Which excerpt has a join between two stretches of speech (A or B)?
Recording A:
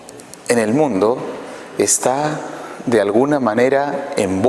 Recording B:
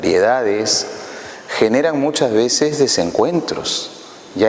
A